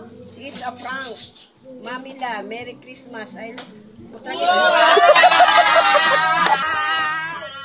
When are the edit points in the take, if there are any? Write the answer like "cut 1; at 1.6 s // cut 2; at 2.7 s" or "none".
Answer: cut 1; at 6.6 s

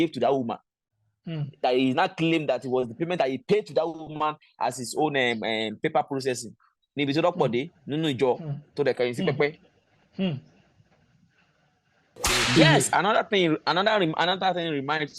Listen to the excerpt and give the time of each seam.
cut 1; at 12.1 s

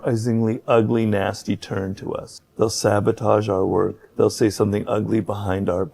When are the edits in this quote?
cut 1; at 2.4 s // cut 2; at 4.0 s

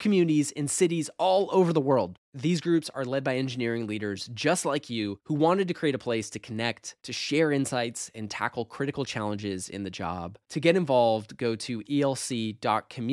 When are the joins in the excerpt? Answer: none

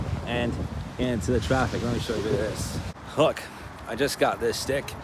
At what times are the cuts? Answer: cut 1; at 3.0 s

